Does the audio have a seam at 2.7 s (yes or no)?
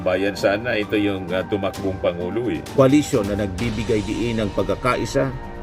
yes